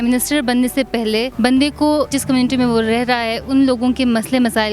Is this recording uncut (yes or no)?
no